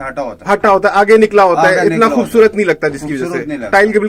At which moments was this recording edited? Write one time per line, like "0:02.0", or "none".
none